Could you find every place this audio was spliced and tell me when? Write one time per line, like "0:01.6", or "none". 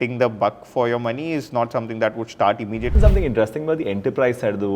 0:02.9